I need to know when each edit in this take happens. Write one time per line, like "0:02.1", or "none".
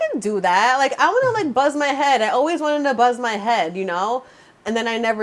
none